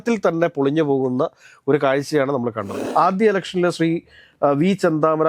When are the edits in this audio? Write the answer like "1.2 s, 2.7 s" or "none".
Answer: 2.7 s